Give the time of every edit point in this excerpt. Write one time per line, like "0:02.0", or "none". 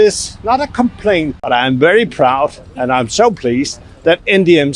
0:01.3

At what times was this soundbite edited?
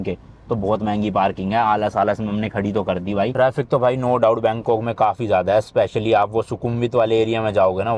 0:03.3

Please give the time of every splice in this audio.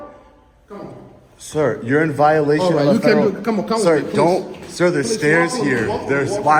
none

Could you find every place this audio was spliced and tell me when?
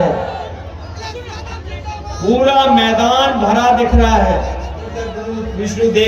0:05.2

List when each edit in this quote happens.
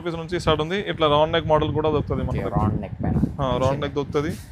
none

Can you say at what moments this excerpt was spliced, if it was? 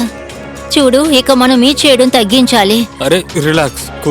none

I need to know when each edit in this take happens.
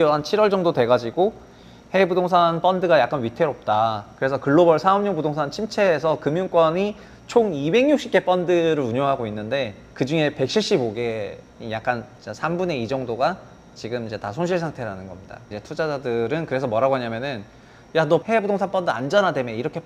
0:09.8
0:11.9
0:15.6
0:18.2

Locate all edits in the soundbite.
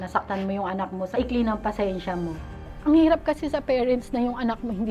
0:01.2
0:02.7

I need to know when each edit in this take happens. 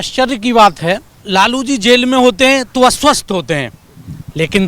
0:01.1

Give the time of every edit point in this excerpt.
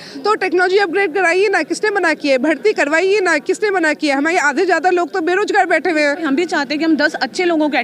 0:06.2

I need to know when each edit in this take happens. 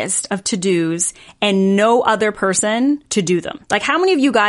0:03.3

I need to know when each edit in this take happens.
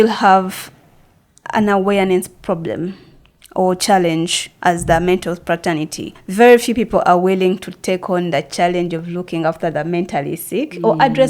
0:06.1

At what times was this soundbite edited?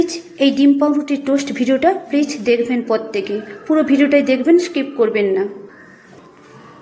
0:05.7

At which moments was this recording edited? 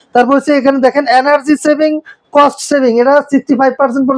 none

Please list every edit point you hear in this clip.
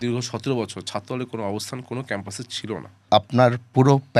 0:03.0

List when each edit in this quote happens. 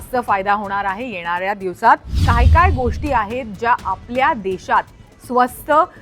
0:02.2

